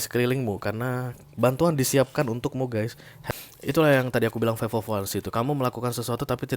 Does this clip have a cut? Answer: yes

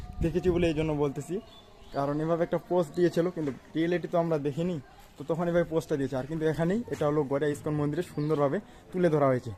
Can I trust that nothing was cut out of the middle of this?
yes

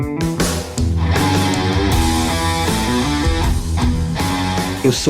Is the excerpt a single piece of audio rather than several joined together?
yes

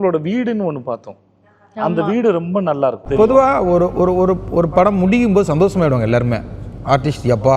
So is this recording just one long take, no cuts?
no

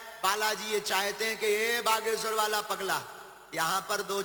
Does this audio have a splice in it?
no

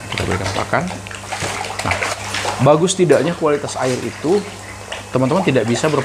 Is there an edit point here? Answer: yes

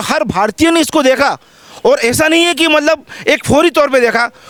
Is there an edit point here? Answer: no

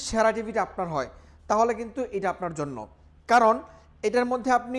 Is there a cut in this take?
no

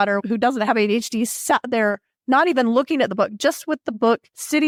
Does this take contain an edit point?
no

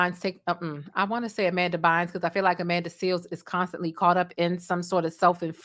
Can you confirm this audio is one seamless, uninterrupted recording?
yes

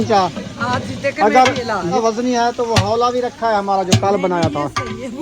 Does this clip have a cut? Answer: yes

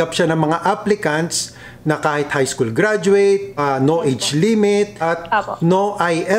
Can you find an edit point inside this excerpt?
yes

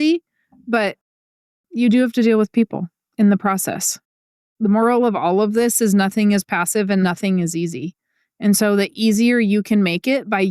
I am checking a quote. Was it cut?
yes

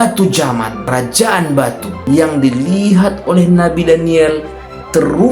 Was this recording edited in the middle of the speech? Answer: yes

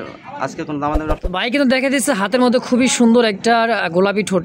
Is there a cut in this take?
yes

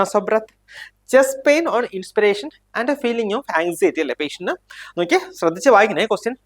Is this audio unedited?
yes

